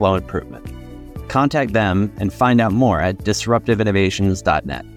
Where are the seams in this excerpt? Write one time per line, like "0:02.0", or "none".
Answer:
none